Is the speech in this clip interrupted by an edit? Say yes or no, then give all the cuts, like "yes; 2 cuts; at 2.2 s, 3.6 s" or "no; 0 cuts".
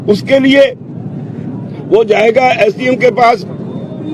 no; 0 cuts